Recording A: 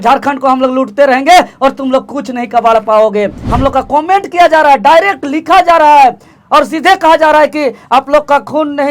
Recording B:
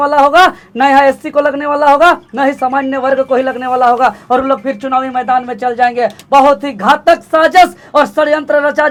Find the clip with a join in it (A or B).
A